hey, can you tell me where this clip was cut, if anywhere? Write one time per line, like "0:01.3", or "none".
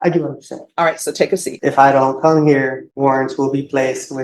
0:01.4
0:02.8